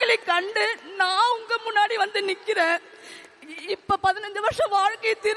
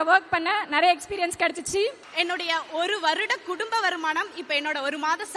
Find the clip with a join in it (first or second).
second